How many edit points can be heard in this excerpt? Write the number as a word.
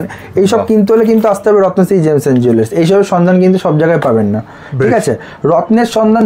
zero